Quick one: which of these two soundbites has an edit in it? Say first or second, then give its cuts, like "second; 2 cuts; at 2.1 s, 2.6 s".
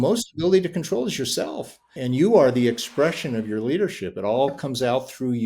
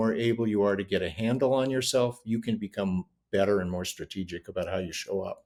first; 1 cut; at 1.9 s